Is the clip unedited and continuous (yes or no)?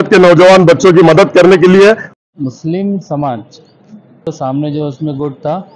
no